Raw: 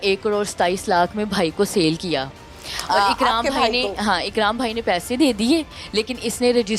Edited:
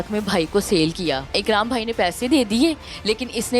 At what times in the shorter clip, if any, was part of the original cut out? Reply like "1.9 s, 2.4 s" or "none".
1.4 s